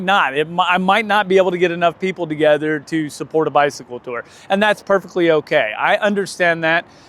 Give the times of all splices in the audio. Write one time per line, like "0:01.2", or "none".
none